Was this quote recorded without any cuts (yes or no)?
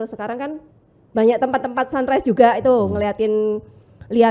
yes